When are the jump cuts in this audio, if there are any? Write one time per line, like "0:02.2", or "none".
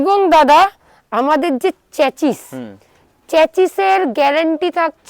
none